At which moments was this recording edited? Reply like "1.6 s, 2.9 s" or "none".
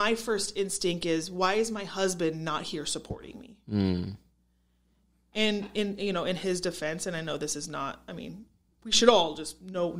none